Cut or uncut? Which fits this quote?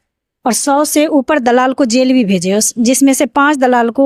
uncut